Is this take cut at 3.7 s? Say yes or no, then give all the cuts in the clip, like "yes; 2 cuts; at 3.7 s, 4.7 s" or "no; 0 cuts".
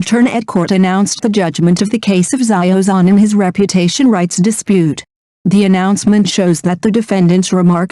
no; 1 cut; at 2.3 s